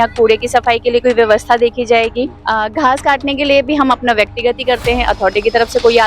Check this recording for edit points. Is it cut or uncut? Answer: cut